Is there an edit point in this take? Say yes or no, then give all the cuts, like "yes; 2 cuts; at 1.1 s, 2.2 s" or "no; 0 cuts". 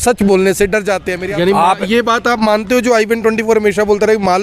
yes; 1 cut; at 1.1 s